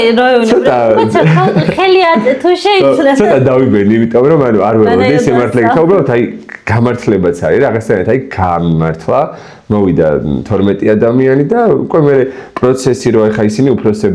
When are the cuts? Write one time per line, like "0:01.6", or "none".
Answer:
none